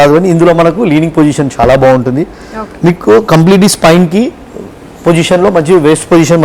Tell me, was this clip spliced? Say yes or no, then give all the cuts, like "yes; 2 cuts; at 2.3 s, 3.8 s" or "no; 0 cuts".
no; 0 cuts